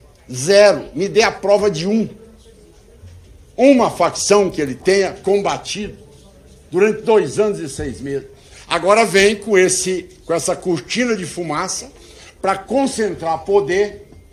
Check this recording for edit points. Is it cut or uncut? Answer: uncut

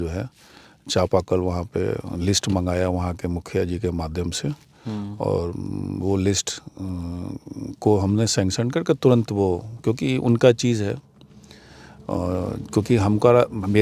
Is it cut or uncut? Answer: uncut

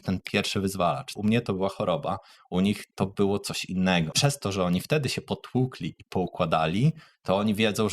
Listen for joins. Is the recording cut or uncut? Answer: cut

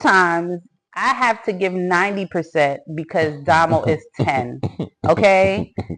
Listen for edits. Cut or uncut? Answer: uncut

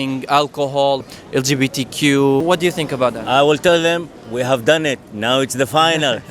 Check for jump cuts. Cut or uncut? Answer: cut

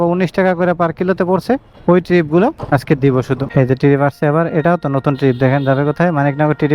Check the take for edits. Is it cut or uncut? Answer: uncut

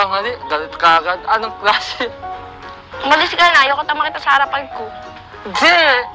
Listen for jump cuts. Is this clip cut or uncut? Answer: uncut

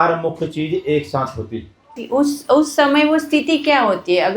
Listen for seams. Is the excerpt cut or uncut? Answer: cut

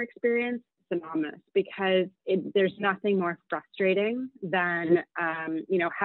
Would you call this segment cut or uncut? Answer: uncut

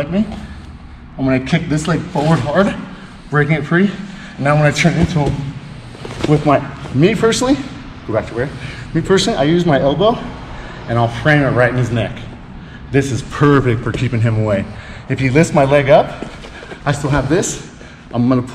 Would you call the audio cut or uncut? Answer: uncut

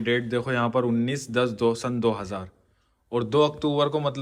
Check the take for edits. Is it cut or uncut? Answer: uncut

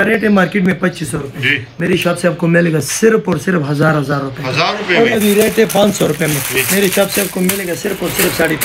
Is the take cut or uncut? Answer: cut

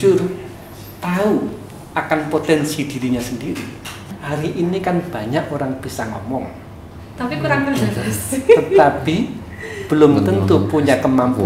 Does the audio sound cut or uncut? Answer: cut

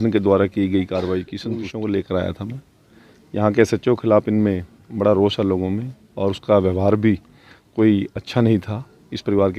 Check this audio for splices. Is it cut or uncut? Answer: cut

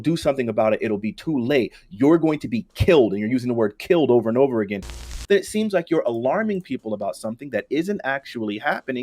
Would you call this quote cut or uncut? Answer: cut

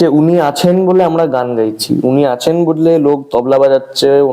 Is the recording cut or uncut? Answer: uncut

